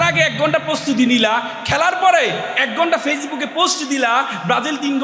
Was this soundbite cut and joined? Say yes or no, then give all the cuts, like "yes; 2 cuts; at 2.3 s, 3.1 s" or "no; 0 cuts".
no; 0 cuts